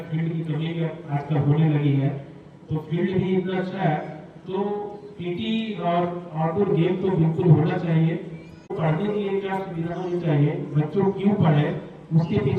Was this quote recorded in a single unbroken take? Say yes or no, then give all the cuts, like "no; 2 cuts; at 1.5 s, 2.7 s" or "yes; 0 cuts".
no; 1 cut; at 8.7 s